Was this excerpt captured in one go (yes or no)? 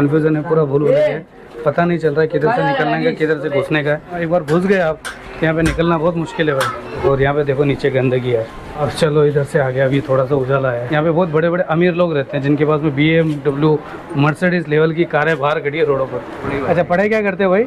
no